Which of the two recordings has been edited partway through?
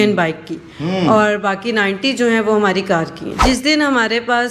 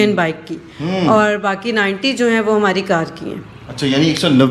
first; 1 cut; at 3.4 s

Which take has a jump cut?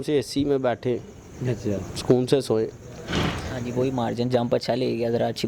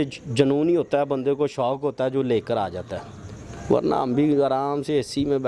first; 1 cut; at 3.6 s

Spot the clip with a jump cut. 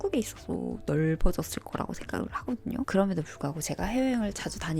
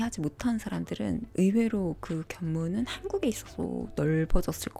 first; 1 cut; at 2.9 s

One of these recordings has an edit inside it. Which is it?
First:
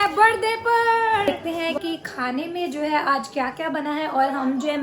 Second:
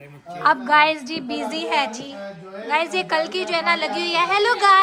first; 1 cut; at 1.3 s

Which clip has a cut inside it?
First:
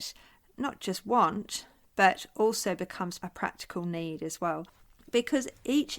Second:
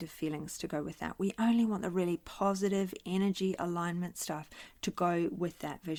first; 2 cuts; at 3.2 s, 4.8 s

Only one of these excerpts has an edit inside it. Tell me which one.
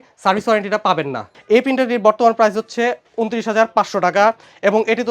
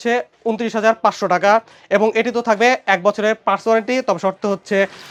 first; 1 cut; at 1.3 s

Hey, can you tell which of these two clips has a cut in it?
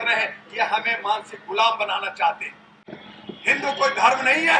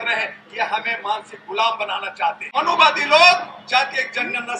second; 1 cut; at 2.4 s

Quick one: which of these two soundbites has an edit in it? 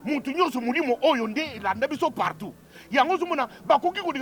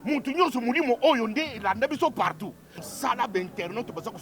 second; 1 cut; at 2.9 s

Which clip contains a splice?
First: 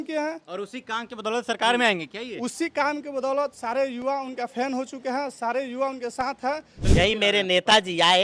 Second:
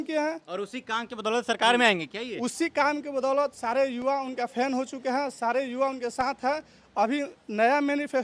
first; 1 cut; at 6.7 s

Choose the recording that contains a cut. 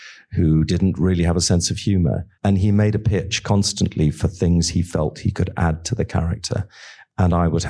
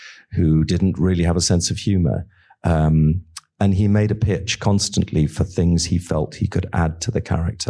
first; 1 cut; at 2.3 s

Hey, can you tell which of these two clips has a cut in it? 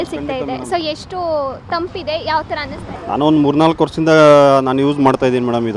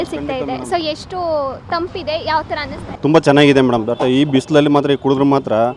second; 1 cut; at 2.9 s

